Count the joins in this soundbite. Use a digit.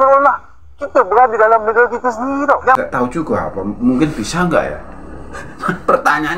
1